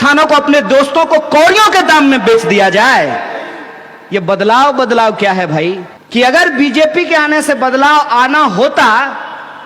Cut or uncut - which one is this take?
cut